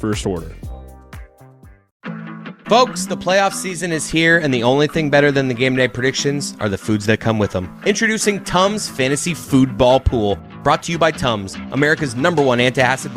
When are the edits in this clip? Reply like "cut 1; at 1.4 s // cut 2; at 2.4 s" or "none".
cut 1; at 1.9 s